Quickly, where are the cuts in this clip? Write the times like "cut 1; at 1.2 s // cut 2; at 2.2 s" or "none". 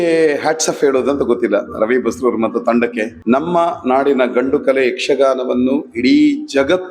cut 1; at 3.1 s